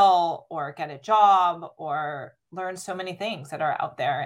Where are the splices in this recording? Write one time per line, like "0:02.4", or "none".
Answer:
0:02.4